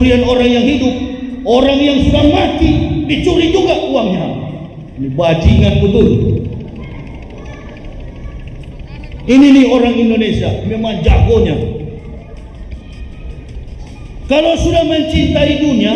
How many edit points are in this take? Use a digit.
0